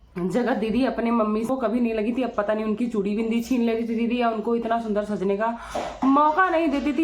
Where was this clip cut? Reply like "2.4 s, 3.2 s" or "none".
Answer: 1.5 s